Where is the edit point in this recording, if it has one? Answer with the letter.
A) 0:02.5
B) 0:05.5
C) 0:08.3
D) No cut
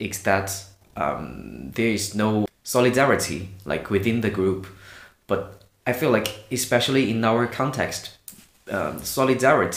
A